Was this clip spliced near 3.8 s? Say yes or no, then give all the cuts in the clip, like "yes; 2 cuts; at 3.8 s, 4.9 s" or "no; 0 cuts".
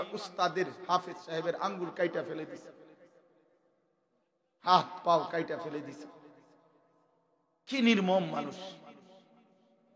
no; 0 cuts